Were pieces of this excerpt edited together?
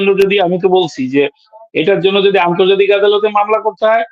no; 0 cuts

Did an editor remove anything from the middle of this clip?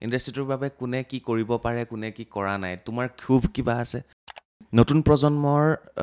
yes; 1 cut; at 4.3 s

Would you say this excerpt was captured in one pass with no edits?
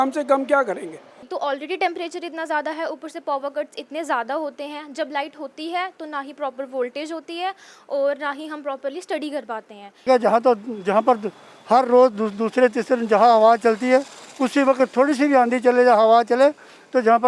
no; 2 cuts; at 1.3 s, 10.1 s

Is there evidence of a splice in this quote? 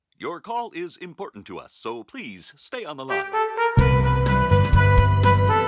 yes; 1 cut; at 3.1 s

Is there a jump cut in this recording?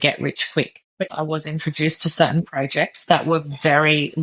yes; 1 cut; at 1.1 s

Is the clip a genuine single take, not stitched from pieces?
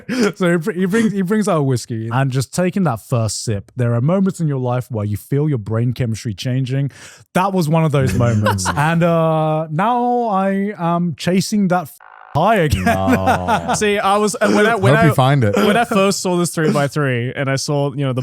no; 3 cuts; at 2.0 s, 3.7 s, 8.7 s

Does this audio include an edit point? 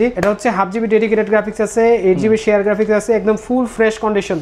no; 0 cuts

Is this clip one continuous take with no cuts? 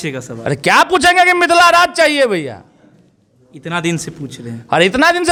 yes; 0 cuts

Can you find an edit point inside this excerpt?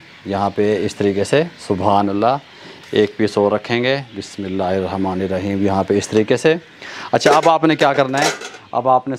no; 0 cuts

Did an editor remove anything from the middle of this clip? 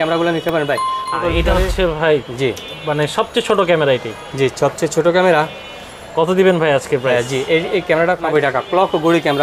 yes; 2 cuts; at 1.1 s, 8.3 s

